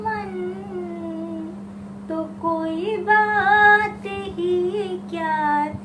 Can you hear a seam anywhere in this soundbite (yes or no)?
no